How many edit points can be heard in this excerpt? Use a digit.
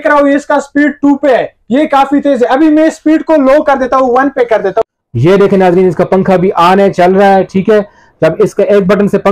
1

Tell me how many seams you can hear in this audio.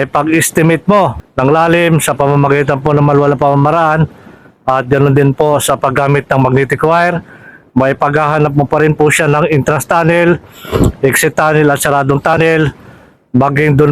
1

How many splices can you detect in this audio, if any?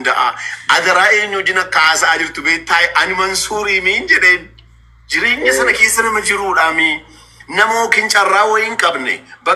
0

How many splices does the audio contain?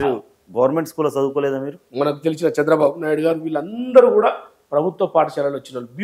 1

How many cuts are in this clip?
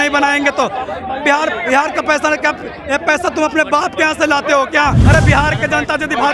1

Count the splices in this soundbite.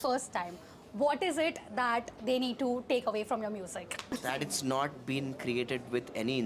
0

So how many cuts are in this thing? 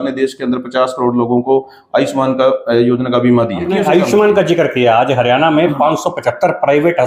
1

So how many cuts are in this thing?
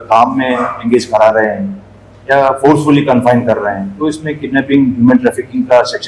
0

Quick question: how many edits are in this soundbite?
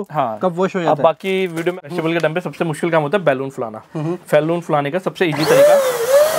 1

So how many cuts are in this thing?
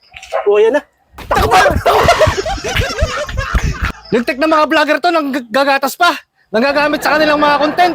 1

